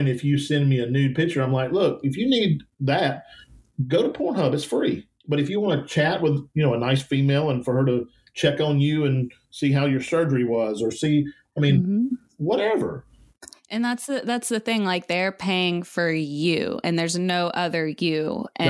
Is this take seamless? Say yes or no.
no